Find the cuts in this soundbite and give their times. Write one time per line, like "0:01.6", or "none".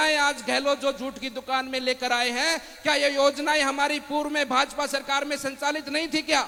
none